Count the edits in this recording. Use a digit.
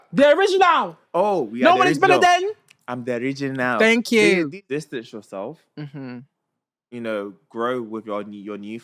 1